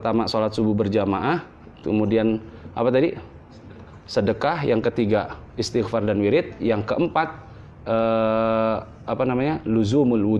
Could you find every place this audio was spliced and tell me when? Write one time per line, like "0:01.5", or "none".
none